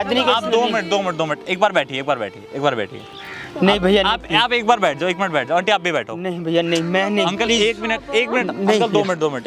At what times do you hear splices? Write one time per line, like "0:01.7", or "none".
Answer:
none